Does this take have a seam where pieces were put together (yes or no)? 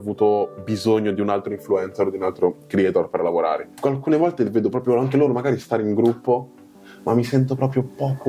yes